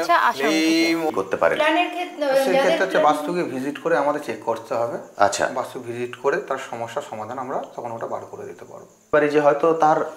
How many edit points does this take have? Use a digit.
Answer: 2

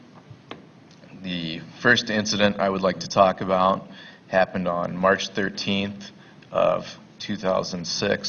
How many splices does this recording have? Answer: 1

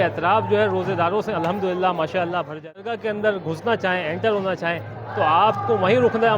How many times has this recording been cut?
1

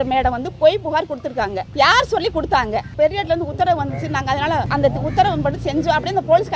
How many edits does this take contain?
3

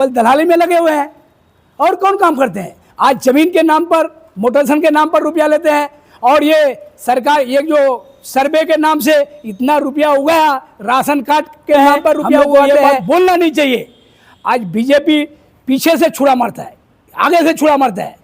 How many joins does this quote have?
1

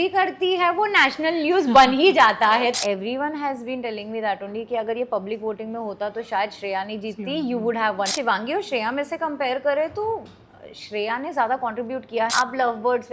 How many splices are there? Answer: 3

